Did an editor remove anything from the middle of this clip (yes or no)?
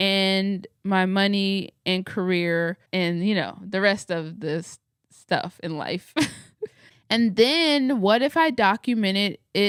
no